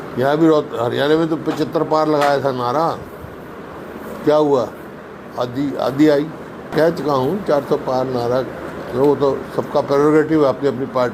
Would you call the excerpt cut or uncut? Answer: cut